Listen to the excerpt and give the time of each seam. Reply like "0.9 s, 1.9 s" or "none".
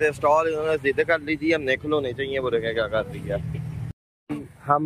3.8 s